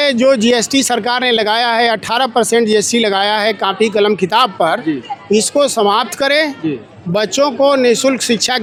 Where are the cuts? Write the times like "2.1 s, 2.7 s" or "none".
none